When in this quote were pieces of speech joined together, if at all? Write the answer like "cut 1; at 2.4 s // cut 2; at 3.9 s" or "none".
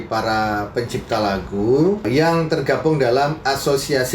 cut 1; at 2.0 s